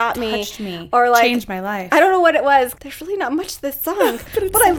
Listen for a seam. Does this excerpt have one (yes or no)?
yes